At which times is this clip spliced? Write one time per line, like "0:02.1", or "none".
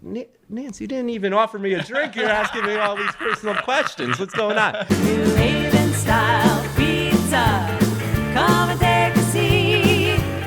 0:04.8